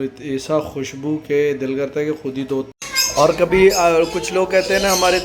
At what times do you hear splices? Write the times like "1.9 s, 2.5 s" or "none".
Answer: 2.7 s